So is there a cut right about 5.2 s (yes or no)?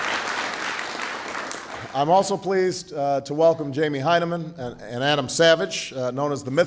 yes